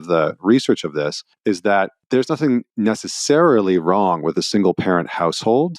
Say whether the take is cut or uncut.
cut